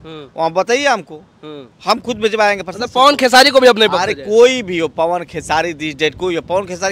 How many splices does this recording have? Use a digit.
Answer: 0